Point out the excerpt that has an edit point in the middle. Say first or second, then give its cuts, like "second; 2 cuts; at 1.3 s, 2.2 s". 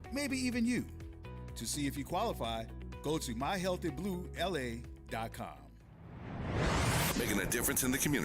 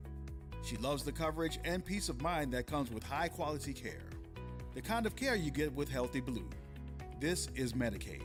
first; 1 cut; at 5.8 s